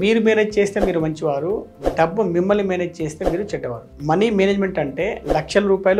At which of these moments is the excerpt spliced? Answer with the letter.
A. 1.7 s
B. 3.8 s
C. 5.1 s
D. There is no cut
B